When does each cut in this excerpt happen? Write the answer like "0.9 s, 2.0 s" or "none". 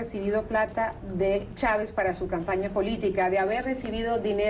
none